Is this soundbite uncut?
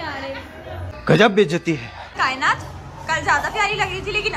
no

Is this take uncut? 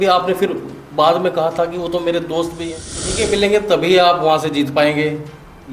no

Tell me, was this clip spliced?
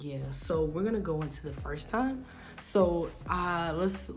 no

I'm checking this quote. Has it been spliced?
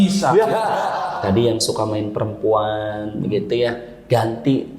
yes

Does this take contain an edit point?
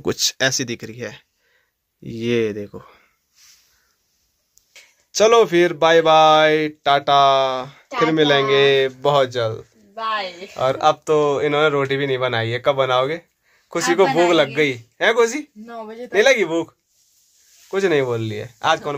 no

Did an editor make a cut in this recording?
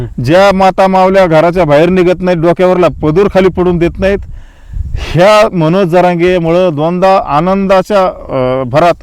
no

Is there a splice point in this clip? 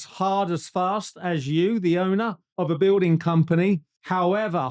no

